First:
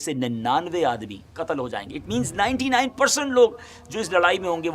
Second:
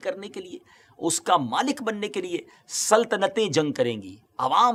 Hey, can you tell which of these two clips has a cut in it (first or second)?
first